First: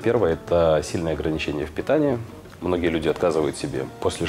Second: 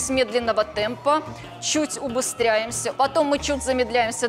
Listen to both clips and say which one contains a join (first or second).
second